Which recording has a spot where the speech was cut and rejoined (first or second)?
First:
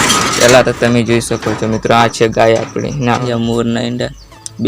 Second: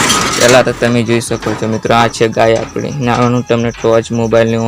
first